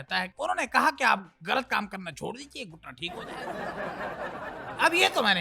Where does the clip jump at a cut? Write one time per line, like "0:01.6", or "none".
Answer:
0:03.1
0:04.3